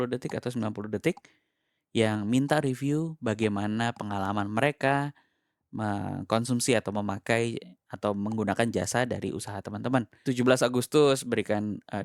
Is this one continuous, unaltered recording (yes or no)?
no